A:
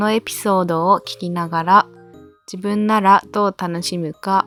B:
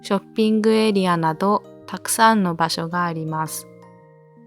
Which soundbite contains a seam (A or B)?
B